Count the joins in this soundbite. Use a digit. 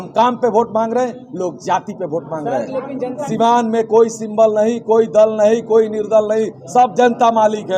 1